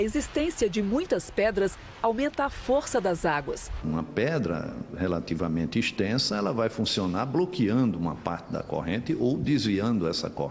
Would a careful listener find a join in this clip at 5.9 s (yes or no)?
yes